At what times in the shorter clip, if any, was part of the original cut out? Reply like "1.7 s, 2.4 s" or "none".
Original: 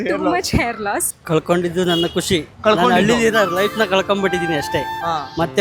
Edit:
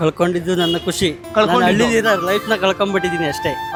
none